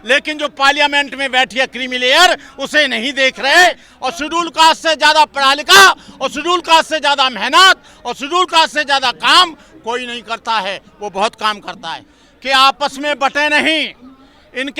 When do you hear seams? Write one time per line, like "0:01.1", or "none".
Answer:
0:03.9
0:12.2